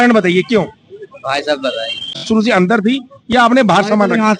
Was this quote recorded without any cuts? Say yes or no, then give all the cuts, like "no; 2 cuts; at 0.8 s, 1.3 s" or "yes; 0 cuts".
no; 1 cut; at 2.3 s